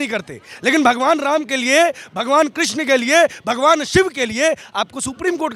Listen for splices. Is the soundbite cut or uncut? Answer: uncut